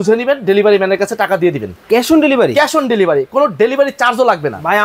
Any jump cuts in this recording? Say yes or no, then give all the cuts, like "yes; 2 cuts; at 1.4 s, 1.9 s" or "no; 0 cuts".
no; 0 cuts